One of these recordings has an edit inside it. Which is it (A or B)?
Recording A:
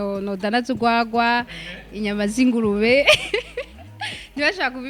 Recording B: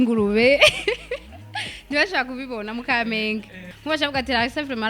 B